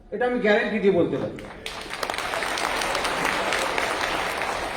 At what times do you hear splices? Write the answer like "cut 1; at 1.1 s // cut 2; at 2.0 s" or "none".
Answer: none